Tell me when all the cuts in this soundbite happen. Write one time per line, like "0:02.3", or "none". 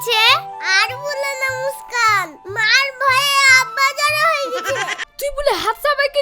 0:05.1